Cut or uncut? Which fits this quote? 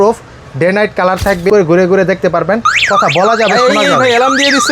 cut